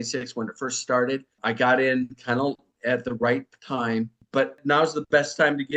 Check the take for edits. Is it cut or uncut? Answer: cut